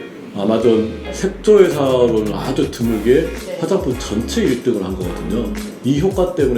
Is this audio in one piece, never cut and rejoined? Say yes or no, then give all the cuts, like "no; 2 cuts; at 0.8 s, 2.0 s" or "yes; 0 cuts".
no; 1 cut; at 1.0 s